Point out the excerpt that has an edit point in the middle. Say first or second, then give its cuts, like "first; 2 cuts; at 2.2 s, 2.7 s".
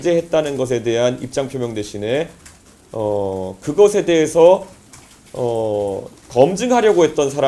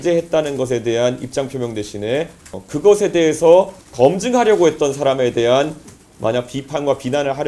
second; 2 cuts; at 2.6 s, 3.8 s